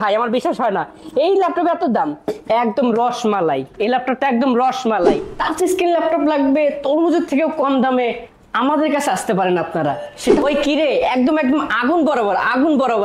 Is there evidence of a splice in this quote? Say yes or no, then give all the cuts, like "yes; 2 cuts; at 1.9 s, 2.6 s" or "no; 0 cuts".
yes; 2 cuts; at 5.3 s, 10.4 s